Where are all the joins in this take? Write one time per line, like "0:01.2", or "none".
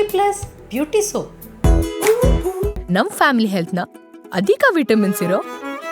0:01.4